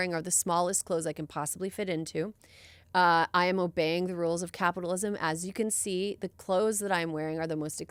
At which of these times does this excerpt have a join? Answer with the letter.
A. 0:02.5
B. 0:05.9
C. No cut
C